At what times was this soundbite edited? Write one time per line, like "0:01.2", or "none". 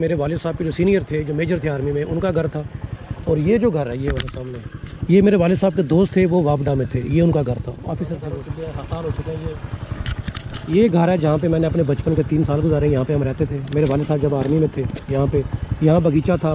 0:08.1